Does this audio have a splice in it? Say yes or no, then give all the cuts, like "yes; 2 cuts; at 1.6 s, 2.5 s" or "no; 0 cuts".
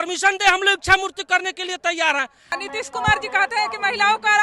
yes; 1 cut; at 2.5 s